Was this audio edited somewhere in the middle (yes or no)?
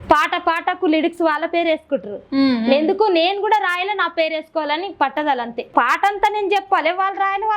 yes